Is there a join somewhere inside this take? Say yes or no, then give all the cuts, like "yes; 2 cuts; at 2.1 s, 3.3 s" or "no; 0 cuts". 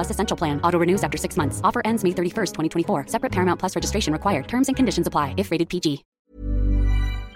yes; 1 cut; at 6.1 s